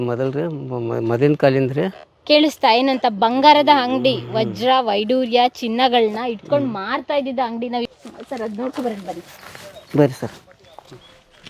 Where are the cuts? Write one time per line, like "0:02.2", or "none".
0:07.9